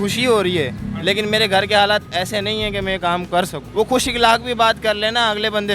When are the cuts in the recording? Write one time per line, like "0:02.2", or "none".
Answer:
0:03.6